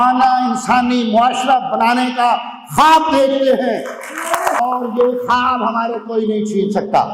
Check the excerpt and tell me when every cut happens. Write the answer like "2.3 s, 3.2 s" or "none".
4.6 s